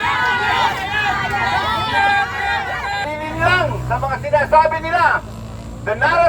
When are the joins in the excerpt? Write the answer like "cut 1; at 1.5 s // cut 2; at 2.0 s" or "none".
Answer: cut 1; at 3.0 s